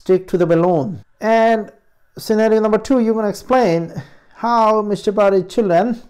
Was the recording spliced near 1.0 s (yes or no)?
yes